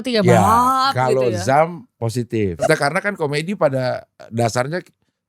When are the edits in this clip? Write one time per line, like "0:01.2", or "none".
0:02.6